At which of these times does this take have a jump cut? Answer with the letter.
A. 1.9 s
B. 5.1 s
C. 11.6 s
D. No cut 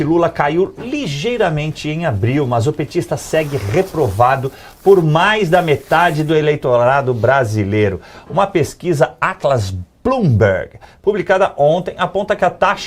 A